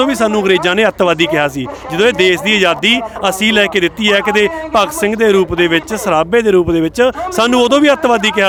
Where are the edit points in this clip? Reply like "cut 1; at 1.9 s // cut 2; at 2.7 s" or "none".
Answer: none